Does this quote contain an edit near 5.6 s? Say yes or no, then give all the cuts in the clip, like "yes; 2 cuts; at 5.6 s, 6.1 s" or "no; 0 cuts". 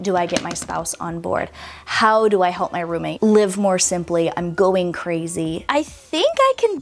yes; 2 cuts; at 3.1 s, 5.6 s